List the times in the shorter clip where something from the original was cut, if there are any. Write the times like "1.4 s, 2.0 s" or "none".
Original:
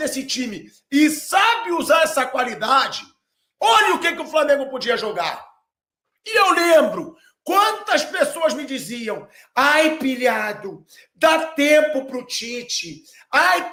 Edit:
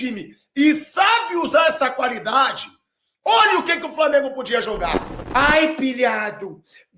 5.1 s